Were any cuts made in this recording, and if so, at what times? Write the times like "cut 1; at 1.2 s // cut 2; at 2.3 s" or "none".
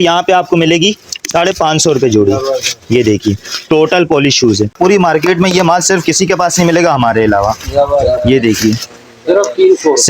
cut 1; at 4.7 s